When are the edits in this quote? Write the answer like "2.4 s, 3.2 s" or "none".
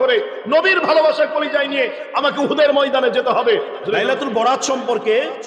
3.8 s